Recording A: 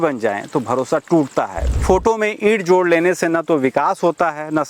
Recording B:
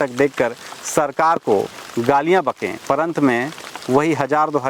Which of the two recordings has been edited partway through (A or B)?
A